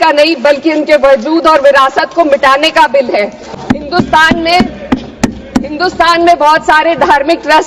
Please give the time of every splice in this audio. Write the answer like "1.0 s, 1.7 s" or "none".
none